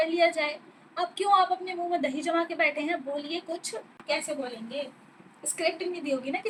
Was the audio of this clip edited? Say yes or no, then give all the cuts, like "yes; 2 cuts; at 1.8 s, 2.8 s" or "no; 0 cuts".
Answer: no; 0 cuts